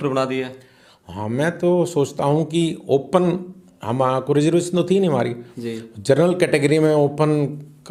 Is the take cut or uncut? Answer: uncut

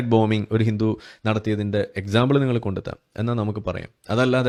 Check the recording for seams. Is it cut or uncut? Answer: uncut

